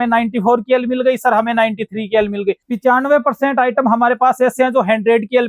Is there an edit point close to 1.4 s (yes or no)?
no